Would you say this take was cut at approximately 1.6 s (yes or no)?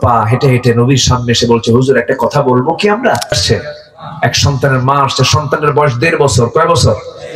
no